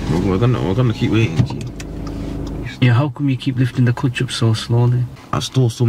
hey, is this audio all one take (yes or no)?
no